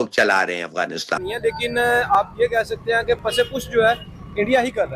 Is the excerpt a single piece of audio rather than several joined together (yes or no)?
no